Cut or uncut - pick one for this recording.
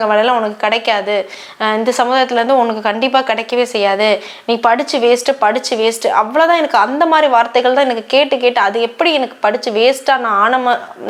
uncut